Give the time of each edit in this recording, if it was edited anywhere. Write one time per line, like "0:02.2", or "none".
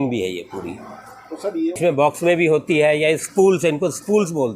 0:01.7

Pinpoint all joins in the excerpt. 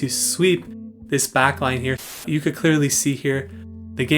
0:02.2

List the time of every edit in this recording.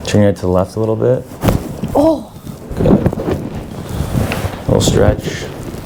none

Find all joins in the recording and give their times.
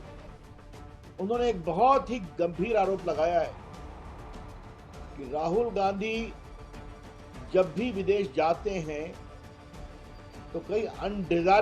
none

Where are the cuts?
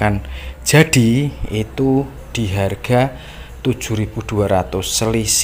none

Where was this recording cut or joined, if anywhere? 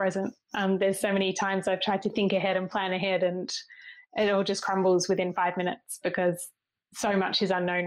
0:06.7

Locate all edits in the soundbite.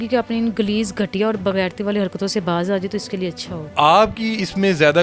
0:03.7

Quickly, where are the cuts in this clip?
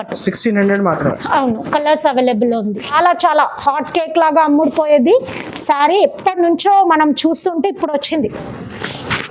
0:02.9

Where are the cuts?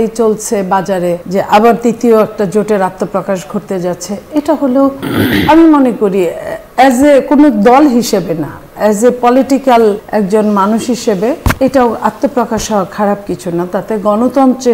0:01.2
0:10.0
0:11.5

